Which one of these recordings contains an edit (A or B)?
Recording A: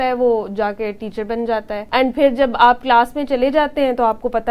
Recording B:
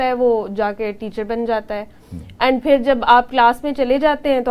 A